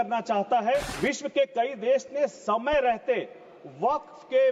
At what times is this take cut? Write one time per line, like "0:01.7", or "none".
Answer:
0:00.9